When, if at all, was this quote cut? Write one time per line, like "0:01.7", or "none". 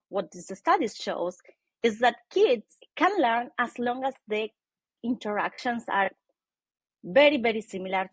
0:02.8